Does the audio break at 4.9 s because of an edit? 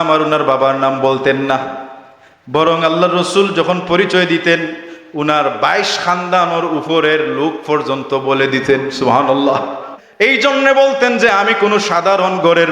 no; 1 cut; at 10.0 s

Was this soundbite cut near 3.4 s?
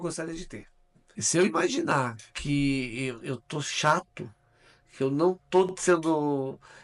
no; 1 cut; at 1.2 s

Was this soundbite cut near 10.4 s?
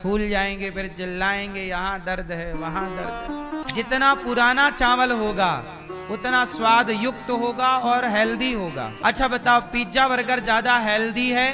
no; 2 cuts; at 3.6 s, 8.9 s

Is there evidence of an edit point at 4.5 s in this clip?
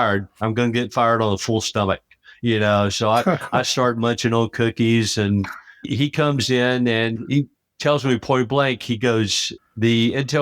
no; 1 cut; at 5.9 s

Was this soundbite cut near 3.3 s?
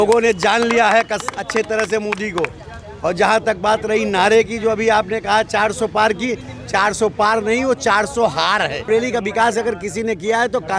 no; 1 cut; at 8.9 s

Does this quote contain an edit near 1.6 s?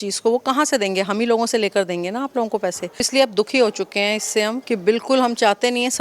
no; 2 cuts; at 3.1 s, 4.6 s

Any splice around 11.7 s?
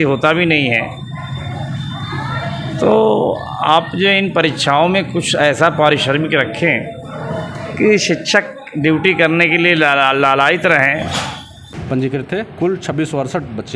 yes; 1 cut; at 11.7 s

